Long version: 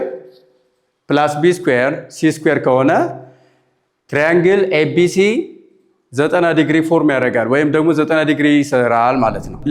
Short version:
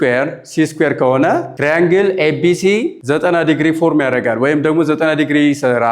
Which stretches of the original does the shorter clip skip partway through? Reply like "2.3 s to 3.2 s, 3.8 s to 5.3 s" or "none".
3.2 s to 4.0 s, 5.5 s to 6.1 s

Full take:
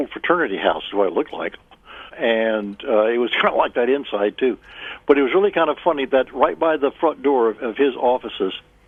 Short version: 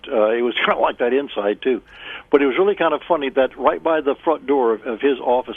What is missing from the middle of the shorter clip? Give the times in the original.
none

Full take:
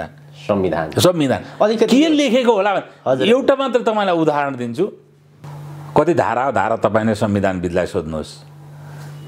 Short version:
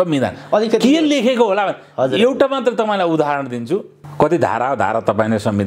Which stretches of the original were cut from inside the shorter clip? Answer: 5.1 s to 5.7 s

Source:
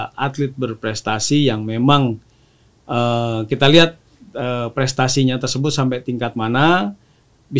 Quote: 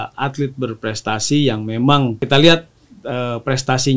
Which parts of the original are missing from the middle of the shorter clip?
2.2 s to 3.5 s

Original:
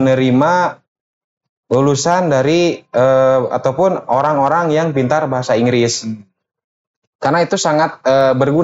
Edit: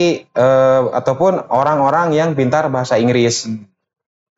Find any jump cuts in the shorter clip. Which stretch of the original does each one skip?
none

